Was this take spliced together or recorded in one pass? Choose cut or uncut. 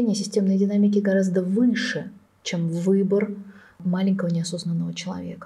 cut